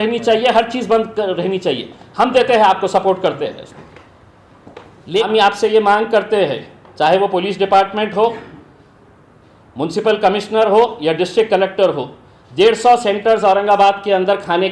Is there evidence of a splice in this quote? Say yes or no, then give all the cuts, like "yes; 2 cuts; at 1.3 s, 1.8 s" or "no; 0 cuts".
yes; 1 cut; at 5.3 s